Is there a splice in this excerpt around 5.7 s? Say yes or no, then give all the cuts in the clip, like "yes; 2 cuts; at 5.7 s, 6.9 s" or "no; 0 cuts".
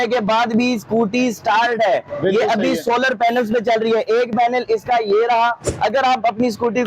yes; 1 cut; at 5.7 s